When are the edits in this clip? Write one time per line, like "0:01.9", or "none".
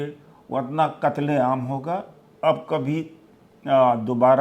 0:02.2